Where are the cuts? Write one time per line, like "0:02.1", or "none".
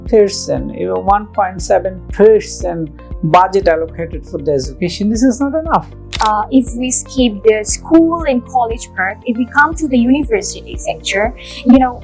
0:06.0